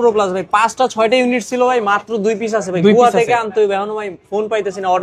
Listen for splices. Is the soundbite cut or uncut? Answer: uncut